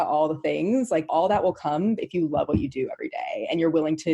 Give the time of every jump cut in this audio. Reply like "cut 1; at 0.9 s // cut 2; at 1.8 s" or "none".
cut 1; at 1.1 s